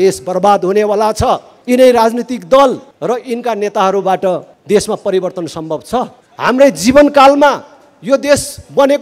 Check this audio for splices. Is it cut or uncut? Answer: cut